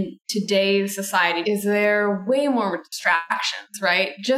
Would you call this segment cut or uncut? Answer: cut